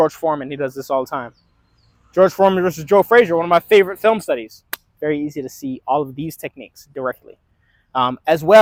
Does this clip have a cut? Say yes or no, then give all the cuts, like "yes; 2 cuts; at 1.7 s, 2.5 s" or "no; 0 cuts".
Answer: no; 0 cuts